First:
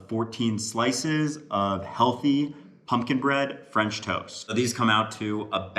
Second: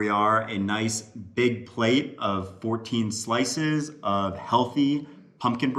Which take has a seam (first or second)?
first